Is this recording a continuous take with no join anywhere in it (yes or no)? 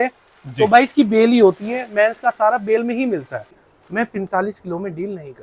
no